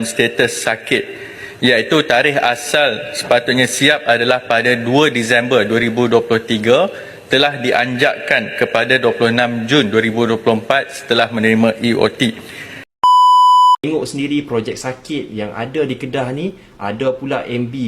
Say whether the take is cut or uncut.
cut